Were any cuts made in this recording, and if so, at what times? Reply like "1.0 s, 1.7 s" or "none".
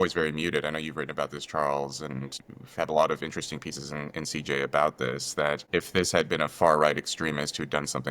2.4 s, 5.6 s